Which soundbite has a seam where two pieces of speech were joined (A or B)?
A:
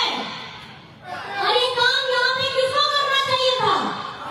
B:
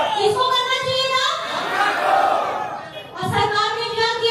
A